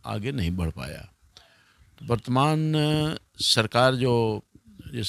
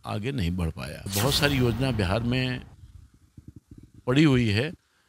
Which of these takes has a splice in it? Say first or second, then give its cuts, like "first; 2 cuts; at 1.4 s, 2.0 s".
second; 1 cut; at 0.9 s